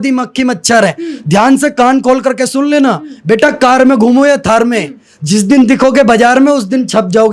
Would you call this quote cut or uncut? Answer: uncut